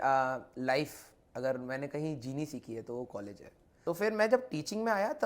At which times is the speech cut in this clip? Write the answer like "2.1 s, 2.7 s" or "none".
3.8 s

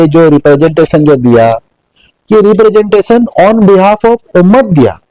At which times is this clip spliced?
none

